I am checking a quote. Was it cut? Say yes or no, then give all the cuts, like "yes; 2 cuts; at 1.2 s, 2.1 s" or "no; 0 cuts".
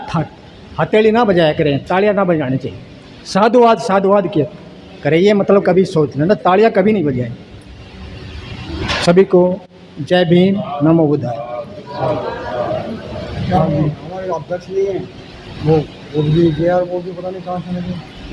no; 0 cuts